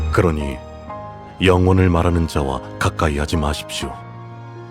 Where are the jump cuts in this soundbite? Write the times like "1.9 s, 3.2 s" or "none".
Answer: 3.8 s